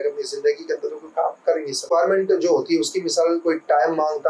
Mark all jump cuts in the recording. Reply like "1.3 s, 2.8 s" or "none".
1.9 s